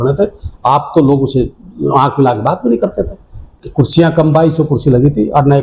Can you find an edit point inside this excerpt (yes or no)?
yes